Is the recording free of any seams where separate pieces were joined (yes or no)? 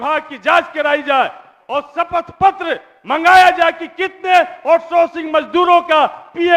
yes